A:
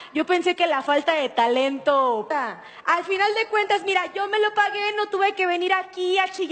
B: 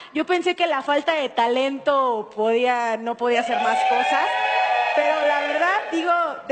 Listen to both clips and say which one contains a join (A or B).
B